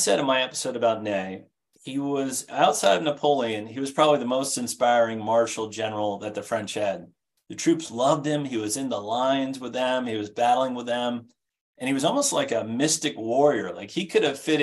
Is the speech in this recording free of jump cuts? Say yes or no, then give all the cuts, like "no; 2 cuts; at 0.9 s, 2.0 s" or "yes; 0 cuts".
yes; 0 cuts